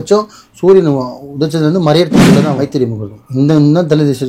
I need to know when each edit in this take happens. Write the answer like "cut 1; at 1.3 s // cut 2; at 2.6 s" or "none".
cut 1; at 2.6 s